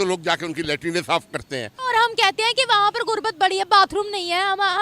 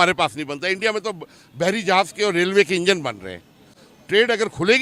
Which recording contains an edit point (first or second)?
first